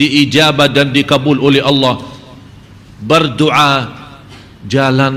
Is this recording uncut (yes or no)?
yes